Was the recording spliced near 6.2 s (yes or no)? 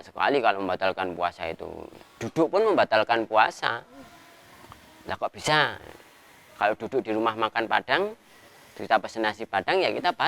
no